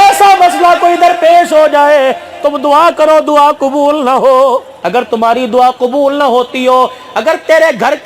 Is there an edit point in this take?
yes; 1 cut; at 4.8 s

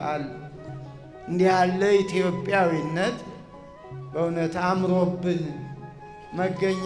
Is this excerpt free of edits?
yes; 0 cuts

